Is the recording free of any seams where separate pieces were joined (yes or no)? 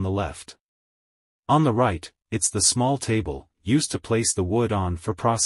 yes